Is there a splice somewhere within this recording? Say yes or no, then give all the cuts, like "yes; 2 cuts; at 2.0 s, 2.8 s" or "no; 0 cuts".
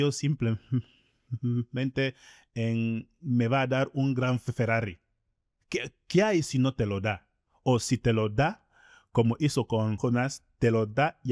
yes; 1 cut; at 10.0 s